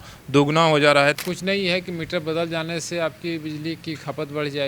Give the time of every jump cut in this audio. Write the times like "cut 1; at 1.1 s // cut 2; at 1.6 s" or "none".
cut 1; at 1.2 s